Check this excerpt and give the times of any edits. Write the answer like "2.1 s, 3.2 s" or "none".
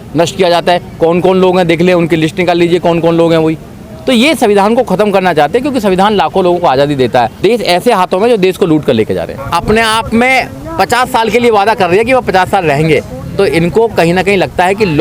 7.3 s, 9.4 s

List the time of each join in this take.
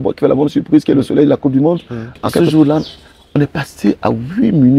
2.4 s

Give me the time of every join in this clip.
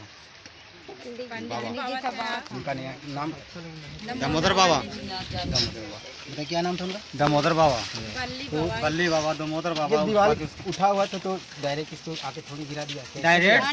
none

